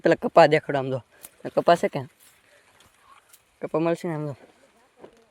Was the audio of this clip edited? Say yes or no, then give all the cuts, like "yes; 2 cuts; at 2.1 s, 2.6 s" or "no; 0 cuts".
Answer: no; 0 cuts